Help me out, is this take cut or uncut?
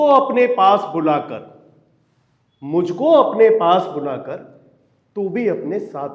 uncut